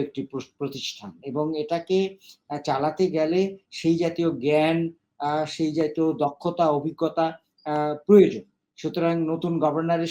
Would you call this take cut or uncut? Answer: uncut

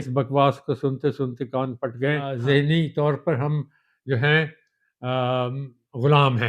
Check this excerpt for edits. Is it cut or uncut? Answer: cut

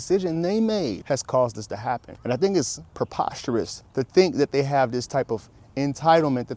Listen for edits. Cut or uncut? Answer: cut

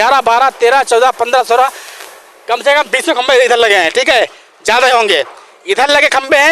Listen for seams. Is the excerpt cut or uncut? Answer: uncut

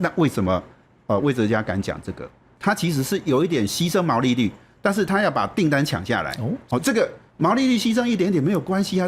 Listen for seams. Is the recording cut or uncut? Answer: cut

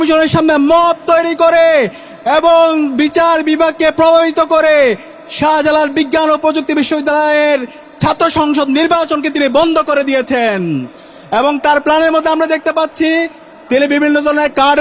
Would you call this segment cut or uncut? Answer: uncut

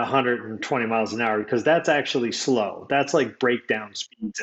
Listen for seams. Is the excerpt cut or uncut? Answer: uncut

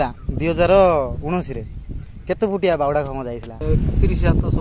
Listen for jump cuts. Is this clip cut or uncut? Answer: cut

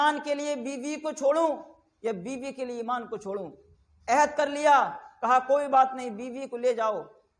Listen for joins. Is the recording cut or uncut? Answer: uncut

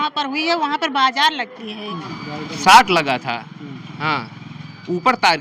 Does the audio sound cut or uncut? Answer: cut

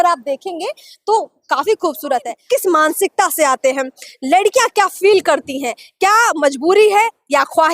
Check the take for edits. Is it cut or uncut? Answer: cut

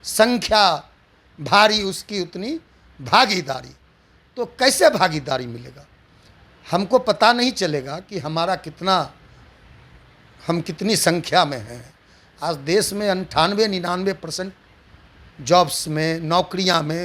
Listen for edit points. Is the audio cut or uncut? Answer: uncut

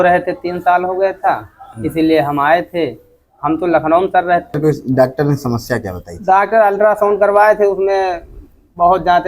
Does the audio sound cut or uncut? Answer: cut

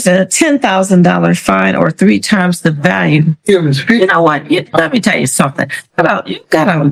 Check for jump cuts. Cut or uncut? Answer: uncut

